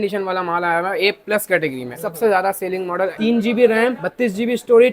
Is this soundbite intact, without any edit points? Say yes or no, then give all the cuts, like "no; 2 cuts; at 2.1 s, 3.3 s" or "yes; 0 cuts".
no; 2 cuts; at 1.9 s, 3.1 s